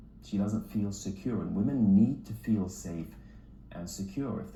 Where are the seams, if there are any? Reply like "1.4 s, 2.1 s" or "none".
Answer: none